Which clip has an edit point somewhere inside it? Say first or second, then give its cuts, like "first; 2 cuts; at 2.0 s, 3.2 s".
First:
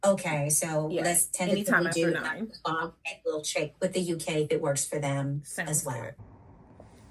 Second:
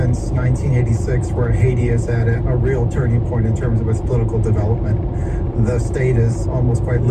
first; 1 cut; at 6.2 s